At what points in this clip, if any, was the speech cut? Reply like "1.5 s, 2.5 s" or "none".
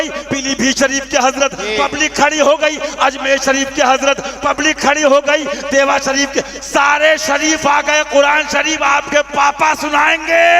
none